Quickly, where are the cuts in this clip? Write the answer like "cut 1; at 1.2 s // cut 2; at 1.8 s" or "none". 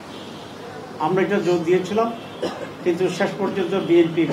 none

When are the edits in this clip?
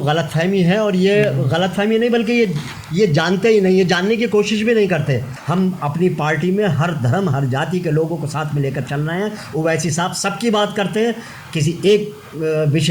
cut 1; at 5.3 s

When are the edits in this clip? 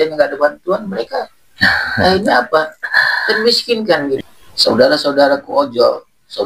cut 1; at 4.2 s

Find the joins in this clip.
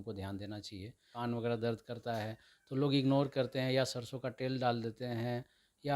cut 1; at 1.0 s

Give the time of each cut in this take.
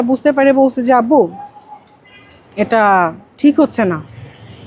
none

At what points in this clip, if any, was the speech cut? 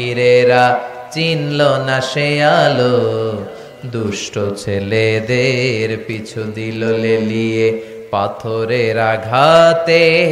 none

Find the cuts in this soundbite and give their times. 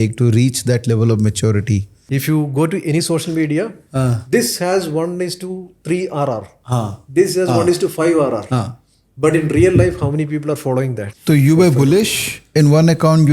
cut 1; at 2.2 s // cut 2; at 11.1 s

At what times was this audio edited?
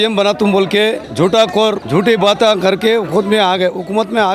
cut 1; at 1.1 s // cut 2; at 1.8 s

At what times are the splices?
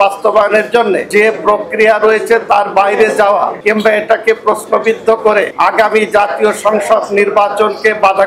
cut 1; at 1.0 s // cut 2; at 3.6 s // cut 3; at 5.5 s

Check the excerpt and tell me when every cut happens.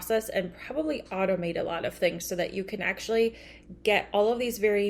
none

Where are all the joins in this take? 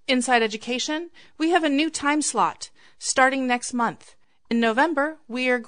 cut 1; at 4.5 s

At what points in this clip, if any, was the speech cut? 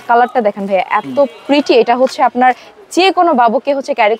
none

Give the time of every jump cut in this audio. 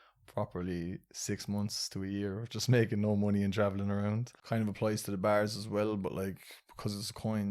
cut 1; at 4.3 s

